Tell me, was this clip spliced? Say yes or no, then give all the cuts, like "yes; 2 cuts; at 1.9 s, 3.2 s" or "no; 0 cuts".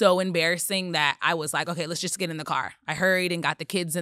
no; 0 cuts